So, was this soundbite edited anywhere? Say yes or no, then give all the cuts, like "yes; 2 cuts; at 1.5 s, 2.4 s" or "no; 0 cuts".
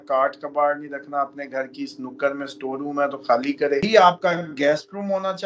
yes; 1 cut; at 3.8 s